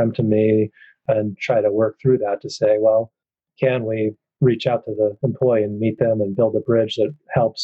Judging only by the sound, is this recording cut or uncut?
uncut